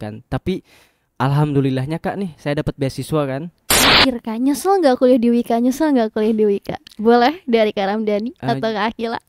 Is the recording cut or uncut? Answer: cut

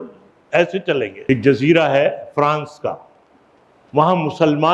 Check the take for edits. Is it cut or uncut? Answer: cut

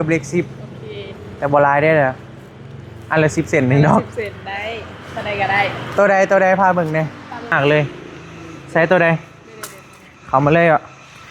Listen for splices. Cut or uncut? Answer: cut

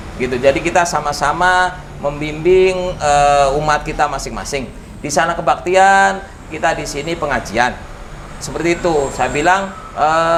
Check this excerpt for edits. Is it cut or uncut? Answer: uncut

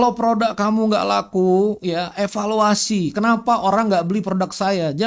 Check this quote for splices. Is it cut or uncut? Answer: uncut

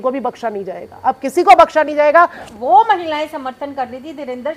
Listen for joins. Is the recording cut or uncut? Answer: cut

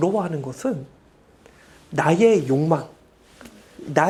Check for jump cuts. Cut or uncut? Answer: uncut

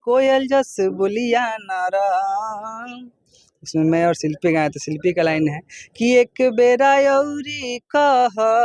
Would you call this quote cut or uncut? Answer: uncut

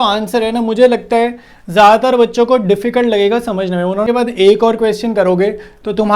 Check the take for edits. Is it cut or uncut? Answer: cut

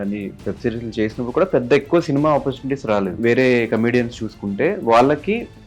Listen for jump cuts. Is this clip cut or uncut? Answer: cut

